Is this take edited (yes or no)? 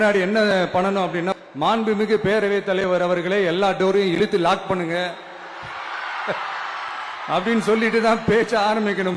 yes